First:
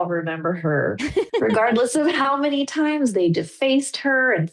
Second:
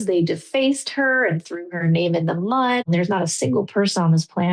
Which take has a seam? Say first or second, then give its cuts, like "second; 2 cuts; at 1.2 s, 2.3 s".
second; 1 cut; at 2.8 s